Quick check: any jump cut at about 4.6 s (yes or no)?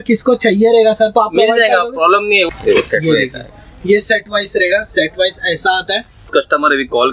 no